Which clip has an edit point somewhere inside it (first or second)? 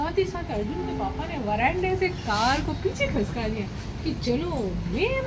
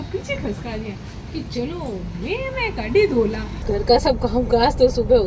second